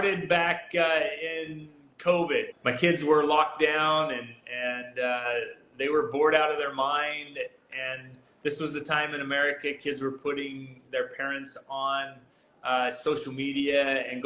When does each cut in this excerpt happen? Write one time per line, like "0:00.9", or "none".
0:02.5